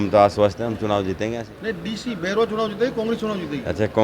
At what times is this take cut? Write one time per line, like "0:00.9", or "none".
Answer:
0:01.6